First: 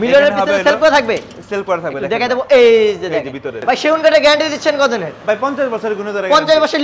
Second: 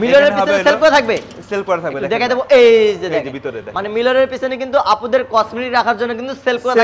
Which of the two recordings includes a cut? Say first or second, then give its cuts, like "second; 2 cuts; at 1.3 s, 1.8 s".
first; 1 cut; at 3.6 s